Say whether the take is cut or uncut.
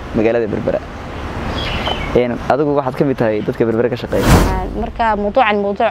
cut